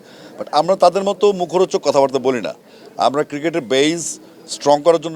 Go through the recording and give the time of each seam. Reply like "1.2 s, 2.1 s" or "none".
none